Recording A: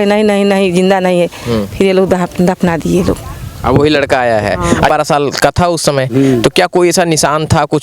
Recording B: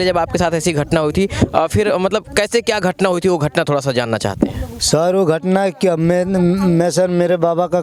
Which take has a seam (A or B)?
A